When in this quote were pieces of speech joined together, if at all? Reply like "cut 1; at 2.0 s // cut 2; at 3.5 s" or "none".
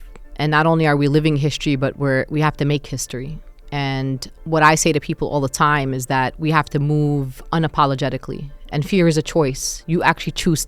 cut 1; at 4.3 s